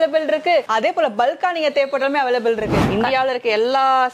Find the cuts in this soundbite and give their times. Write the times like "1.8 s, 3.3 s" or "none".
2.9 s